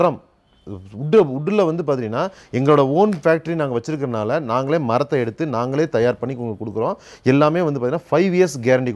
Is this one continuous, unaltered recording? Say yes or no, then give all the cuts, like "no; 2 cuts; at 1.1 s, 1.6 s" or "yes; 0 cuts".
yes; 0 cuts